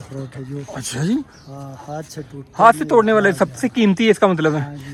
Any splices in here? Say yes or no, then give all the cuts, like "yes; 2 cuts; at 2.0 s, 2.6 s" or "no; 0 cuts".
no; 0 cuts